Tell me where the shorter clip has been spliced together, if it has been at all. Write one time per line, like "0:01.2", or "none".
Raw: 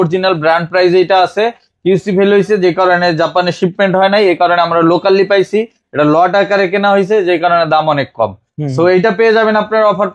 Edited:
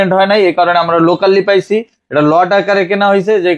none